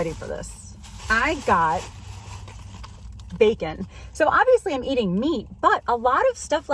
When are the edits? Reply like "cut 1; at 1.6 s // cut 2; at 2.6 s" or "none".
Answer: none